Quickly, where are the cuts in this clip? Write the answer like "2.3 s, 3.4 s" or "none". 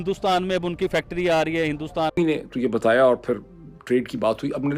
2.1 s